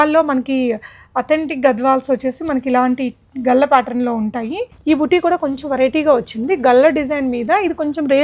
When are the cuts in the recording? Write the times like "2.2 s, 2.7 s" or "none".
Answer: 4.7 s